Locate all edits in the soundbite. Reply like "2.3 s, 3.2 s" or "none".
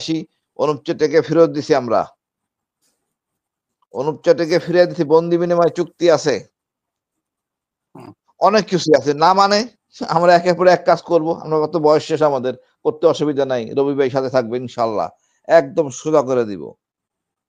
none